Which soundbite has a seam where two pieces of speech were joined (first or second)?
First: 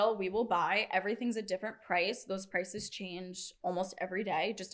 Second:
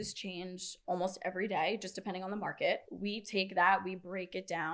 second